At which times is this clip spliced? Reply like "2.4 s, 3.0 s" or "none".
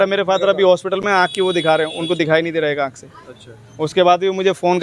none

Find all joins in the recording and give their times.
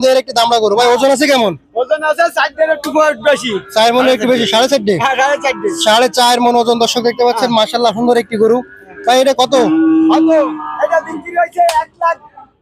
none

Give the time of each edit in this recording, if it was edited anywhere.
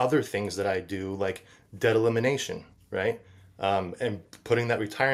none

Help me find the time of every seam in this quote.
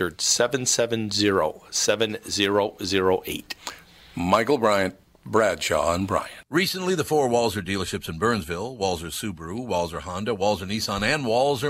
6.4 s

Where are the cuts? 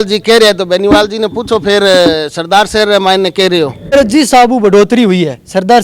3.8 s

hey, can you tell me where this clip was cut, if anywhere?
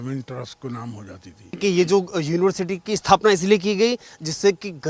1.6 s

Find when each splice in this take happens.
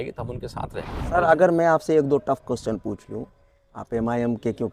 1.1 s

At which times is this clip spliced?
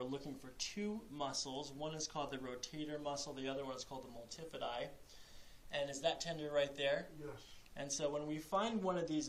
7.8 s

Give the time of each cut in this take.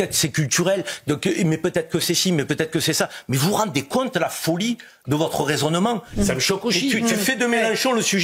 6.1 s

